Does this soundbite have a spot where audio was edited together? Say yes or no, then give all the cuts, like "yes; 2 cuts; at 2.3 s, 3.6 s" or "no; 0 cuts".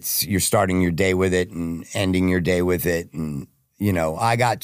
no; 0 cuts